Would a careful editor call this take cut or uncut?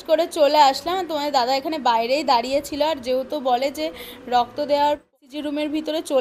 cut